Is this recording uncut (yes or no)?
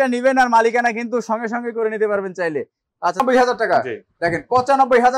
no